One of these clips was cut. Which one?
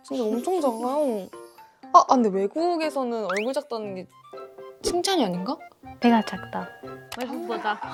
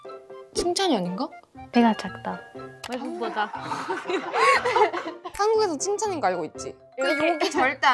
second; 1 cut; at 7.0 s

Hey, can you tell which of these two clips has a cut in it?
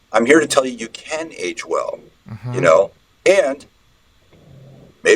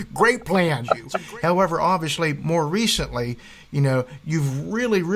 second; 1 cut; at 1.0 s

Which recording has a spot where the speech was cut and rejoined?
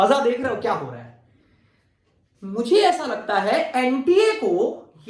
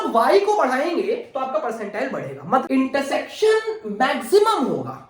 second; 1 cut; at 2.6 s

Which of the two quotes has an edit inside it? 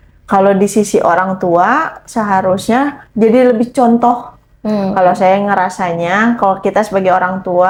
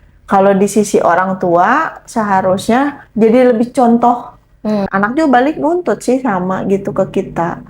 second; 1 cut; at 4.9 s

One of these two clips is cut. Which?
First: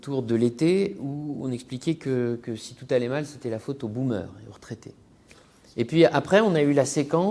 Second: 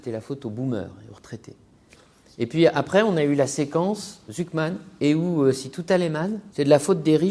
second; 2 cuts; at 4.9 s, 6.4 s

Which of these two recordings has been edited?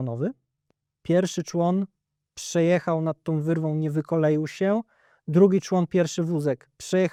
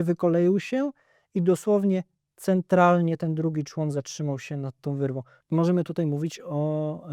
second; 1 cut; at 5.4 s

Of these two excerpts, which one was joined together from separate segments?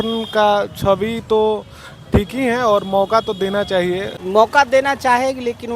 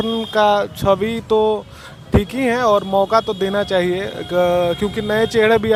first; 1 cut; at 4.1 s

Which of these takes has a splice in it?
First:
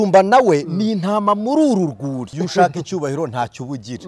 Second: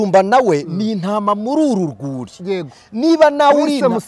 first; 1 cut; at 2.3 s

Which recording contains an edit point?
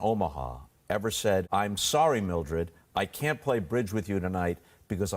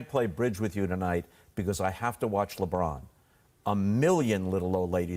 first; 1 cut; at 1.5 s

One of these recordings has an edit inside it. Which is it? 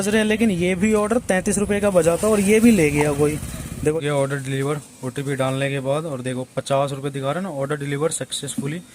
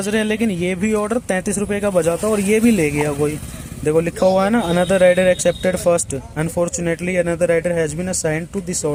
first; 1 cut; at 3.9 s

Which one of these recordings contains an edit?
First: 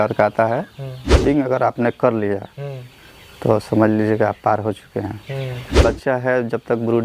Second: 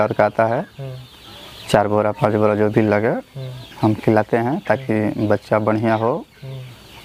first; 2 cuts; at 1.2 s, 5.8 s

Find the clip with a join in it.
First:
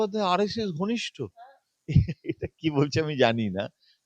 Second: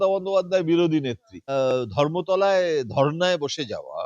second; 1 cut; at 1.5 s

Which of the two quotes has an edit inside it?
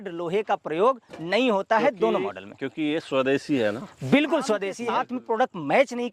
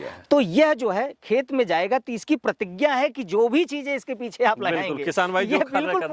first; 1 cut; at 4.8 s

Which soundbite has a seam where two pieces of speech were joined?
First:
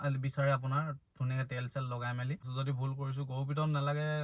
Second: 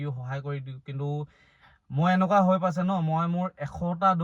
first; 1 cut; at 2.4 s

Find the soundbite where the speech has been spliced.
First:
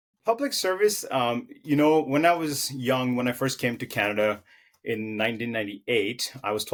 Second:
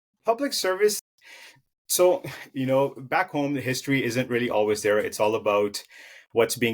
second; 1 cut; at 1.0 s

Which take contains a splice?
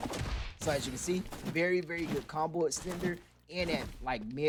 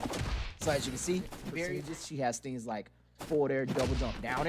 second; 1 cut; at 1.6 s

